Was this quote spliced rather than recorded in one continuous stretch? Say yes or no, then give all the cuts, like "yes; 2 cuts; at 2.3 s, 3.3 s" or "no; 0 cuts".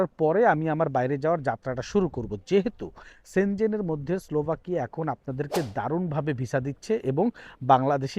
no; 0 cuts